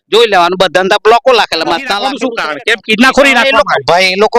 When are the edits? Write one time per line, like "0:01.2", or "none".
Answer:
0:02.1